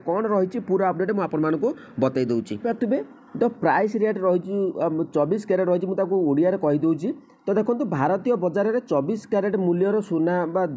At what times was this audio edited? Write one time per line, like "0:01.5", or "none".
0:02.6